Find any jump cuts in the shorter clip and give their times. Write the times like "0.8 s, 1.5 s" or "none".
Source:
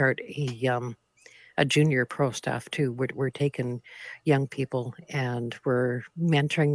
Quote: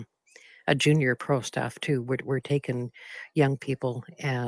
none